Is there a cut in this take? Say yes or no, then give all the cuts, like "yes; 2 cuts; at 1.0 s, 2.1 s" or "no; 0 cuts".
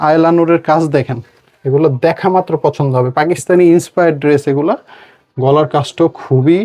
no; 0 cuts